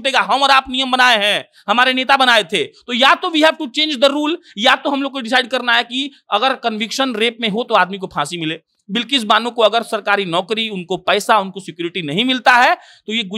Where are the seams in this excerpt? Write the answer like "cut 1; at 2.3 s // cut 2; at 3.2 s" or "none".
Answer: none